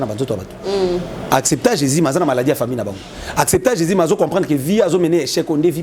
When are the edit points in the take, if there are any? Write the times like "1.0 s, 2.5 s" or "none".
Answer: none